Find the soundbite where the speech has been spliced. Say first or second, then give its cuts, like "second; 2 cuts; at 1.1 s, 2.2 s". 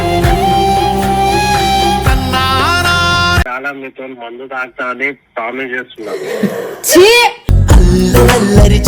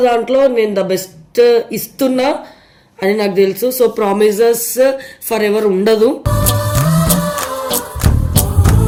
first; 1 cut; at 3.5 s